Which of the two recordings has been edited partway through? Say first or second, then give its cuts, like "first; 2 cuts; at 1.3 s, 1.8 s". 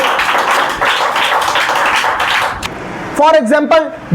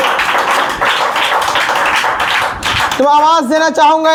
first; 1 cut; at 2.6 s